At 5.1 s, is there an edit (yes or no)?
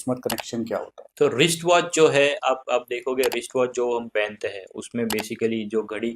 no